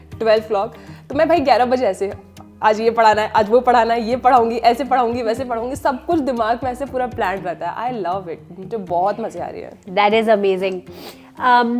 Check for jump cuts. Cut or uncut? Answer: uncut